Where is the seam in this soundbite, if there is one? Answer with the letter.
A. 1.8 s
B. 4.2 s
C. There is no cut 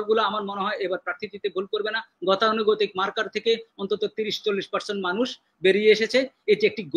C